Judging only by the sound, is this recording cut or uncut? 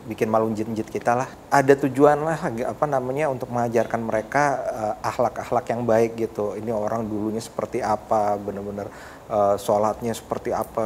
cut